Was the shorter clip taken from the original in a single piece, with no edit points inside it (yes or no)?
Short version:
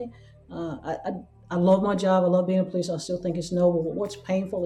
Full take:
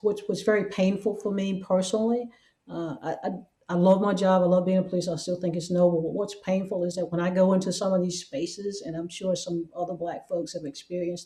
yes